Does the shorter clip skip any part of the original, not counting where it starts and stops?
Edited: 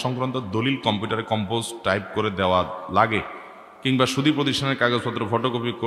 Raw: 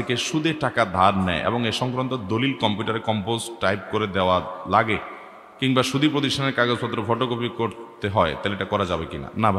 no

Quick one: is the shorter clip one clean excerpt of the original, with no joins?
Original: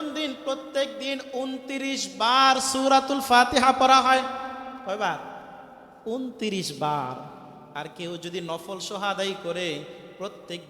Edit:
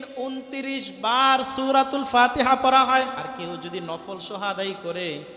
no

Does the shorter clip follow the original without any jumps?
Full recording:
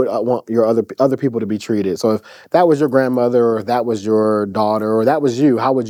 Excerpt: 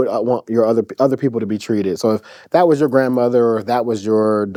yes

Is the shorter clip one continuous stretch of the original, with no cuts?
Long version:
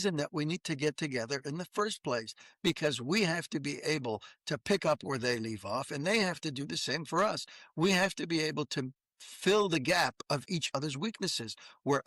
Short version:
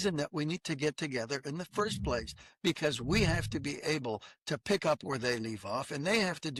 yes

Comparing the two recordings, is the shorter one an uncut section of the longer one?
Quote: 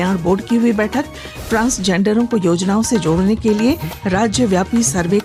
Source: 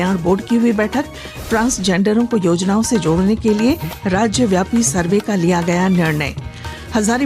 yes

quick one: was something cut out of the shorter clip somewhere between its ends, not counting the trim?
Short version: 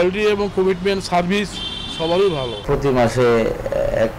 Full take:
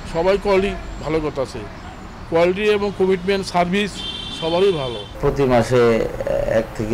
yes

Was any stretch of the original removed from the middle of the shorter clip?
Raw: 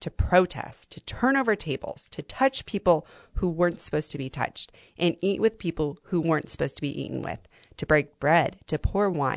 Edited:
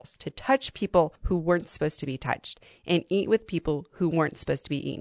yes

